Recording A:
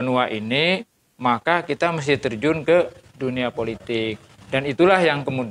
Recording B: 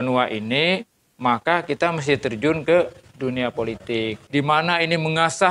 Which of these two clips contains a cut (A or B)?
B